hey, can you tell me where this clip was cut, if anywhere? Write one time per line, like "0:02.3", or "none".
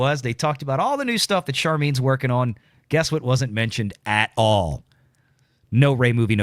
none